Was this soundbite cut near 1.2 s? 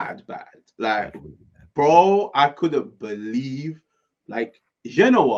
no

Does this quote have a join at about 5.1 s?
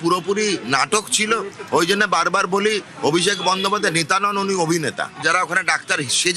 no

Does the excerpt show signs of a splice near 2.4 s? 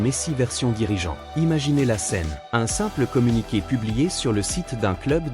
yes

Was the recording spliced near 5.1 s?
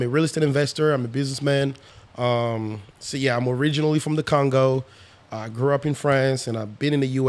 no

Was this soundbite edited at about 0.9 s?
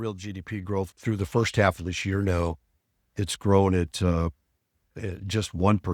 yes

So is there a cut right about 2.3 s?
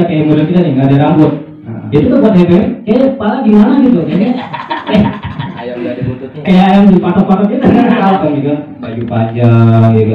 no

